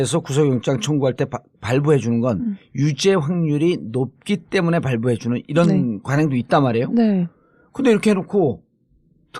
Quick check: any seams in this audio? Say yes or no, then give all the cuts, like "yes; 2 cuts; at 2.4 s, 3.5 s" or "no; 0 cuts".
yes; 1 cut; at 2.6 s